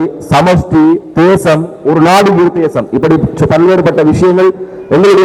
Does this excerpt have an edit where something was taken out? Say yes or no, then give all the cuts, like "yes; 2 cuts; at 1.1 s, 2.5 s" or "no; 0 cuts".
no; 0 cuts